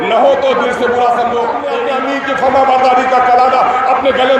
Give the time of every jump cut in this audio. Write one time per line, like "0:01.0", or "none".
0:01.8